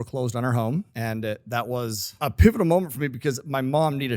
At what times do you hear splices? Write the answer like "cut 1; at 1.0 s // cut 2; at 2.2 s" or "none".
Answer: cut 1; at 0.9 s